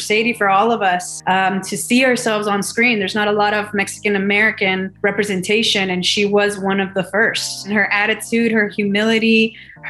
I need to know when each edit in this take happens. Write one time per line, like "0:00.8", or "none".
0:01.1
0:04.9
0:07.7